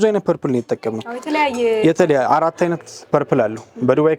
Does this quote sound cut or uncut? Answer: uncut